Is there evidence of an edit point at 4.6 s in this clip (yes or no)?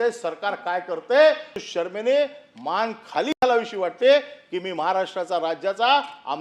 no